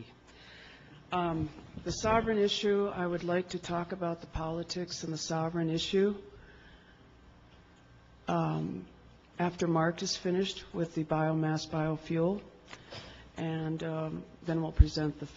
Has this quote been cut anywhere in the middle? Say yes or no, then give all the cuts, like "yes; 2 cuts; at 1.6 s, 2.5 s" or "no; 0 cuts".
no; 0 cuts